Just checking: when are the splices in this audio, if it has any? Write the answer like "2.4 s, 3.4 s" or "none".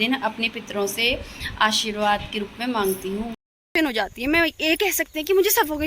3.7 s